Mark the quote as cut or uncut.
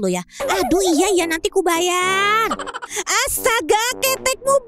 cut